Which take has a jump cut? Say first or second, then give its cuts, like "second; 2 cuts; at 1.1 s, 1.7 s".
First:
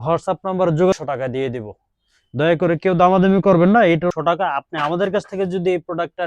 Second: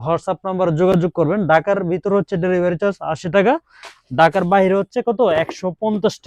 first; 2 cuts; at 0.9 s, 4.2 s